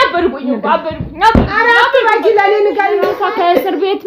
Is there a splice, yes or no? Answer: yes